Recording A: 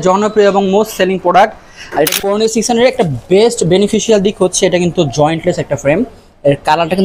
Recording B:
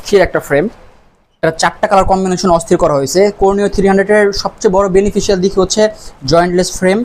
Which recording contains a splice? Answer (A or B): A